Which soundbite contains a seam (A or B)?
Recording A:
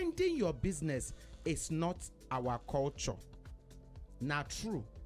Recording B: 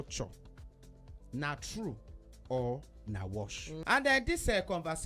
B